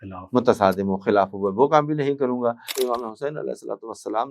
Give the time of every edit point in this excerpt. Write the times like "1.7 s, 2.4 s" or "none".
2.7 s